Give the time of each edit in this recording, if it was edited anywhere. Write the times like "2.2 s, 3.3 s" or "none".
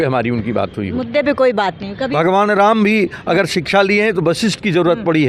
2.1 s